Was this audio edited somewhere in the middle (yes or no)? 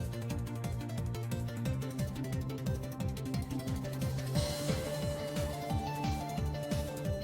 yes